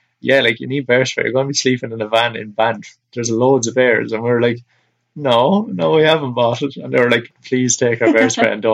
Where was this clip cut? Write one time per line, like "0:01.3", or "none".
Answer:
0:07.3

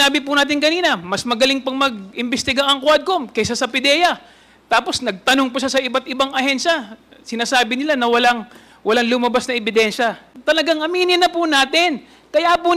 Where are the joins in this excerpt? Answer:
0:10.3

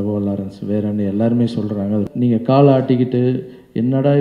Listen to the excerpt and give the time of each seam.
0:02.1

